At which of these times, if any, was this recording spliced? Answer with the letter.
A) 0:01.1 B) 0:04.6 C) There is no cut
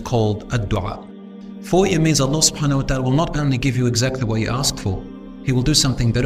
A